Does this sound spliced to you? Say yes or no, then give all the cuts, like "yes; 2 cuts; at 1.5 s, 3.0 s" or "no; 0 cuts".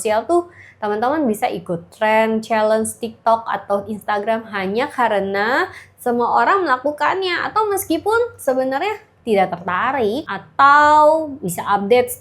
yes; 2 cuts; at 9.1 s, 10.4 s